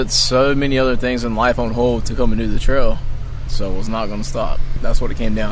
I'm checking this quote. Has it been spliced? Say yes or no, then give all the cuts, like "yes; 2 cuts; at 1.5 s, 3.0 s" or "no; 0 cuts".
yes; 2 cuts; at 3.5 s, 4.7 s